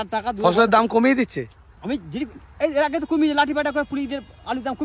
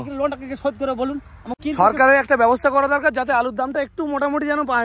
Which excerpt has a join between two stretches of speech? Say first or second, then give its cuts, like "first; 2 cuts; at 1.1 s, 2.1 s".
second; 1 cut; at 1.6 s